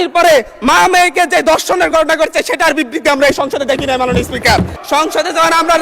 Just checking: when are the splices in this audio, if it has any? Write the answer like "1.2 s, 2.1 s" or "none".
4.8 s